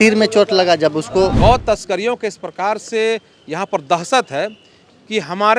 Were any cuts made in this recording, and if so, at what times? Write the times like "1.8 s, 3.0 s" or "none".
1.4 s

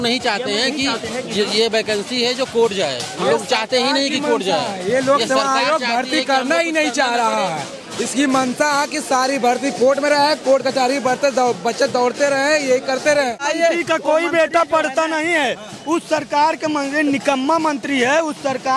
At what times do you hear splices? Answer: 13.4 s

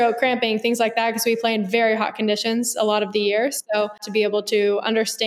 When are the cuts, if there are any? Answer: 4.0 s

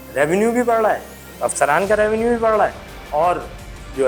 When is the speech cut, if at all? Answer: none

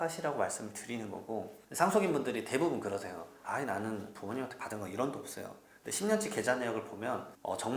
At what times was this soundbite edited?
1.5 s

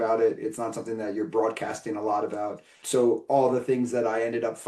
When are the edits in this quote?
2.7 s

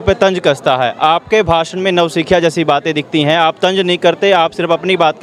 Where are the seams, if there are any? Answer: none

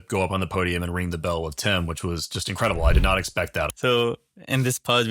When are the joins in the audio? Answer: 3.7 s

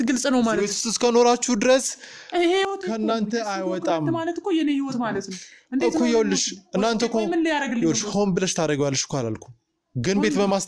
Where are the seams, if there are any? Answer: none

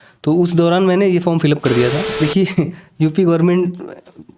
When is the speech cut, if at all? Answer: 2.1 s

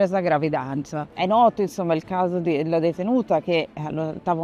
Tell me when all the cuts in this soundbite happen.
1.0 s

